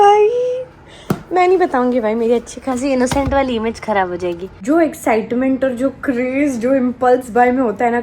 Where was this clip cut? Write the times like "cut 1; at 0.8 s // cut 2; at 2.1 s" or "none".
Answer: cut 1; at 4.5 s